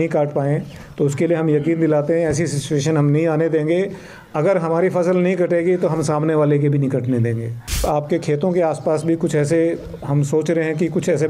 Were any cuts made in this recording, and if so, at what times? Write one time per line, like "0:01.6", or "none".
0:07.8

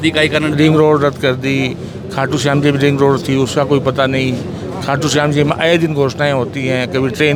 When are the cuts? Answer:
none

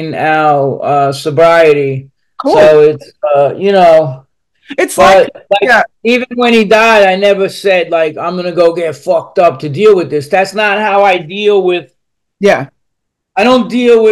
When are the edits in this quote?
none

